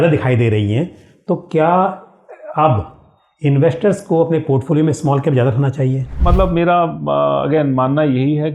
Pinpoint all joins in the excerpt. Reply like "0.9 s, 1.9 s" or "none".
6.1 s